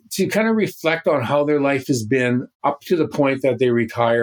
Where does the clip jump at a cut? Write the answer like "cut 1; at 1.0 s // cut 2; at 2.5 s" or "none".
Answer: cut 1; at 2.5 s